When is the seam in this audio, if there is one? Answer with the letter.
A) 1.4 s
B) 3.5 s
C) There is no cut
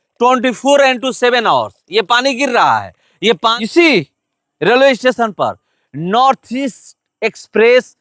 B